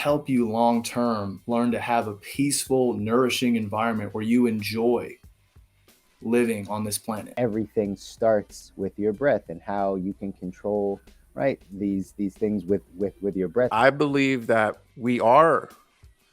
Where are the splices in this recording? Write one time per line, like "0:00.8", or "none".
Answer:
0:07.3
0:13.7